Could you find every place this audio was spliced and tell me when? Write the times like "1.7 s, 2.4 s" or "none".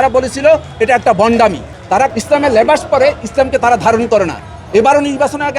2.0 s